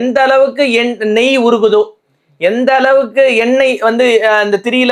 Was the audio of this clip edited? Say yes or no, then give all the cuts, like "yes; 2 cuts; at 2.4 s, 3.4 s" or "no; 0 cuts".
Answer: no; 0 cuts